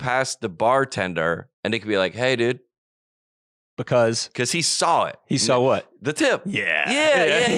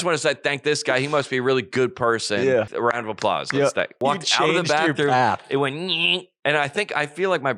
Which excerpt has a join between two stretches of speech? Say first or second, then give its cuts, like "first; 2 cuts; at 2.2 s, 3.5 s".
second; 2 cuts; at 2.7 s, 4.0 s